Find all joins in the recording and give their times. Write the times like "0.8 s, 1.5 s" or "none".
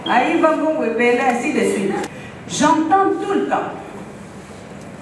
2.1 s